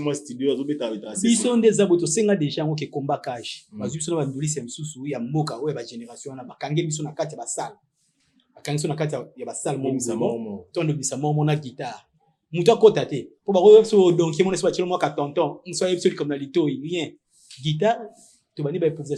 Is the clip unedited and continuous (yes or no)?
yes